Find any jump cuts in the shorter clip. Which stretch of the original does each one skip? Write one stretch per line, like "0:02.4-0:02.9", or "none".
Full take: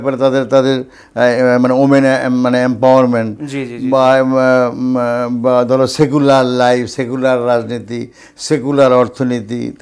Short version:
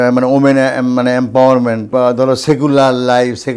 0:03.3-0:05.4